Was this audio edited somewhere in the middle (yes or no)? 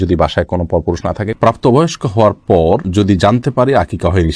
yes